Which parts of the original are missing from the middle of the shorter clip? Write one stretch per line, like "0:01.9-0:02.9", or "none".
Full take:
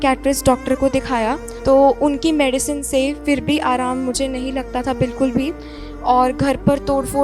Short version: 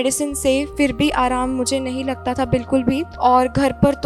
0:05.6-0:05.9